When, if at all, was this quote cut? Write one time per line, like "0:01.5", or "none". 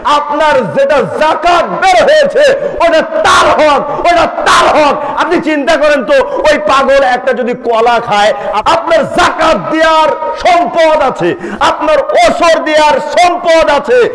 0:08.4